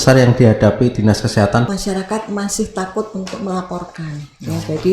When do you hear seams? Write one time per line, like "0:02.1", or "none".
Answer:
0:01.7